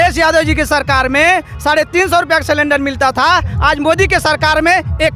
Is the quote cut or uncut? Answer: uncut